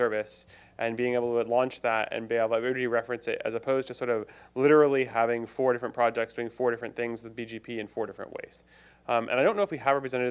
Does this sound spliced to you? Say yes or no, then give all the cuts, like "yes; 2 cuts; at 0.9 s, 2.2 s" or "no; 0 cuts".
no; 0 cuts